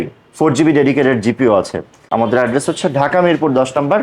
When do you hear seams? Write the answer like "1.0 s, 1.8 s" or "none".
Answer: 2.0 s

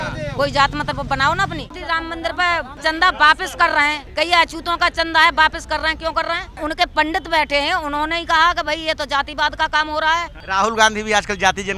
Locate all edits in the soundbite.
1.7 s, 2.8 s, 4.0 s, 6.5 s, 10.4 s

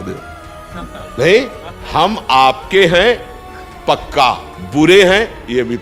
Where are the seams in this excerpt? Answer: 4.5 s

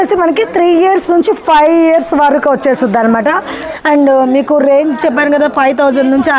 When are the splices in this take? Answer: 3.6 s

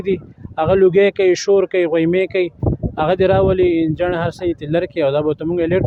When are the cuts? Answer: none

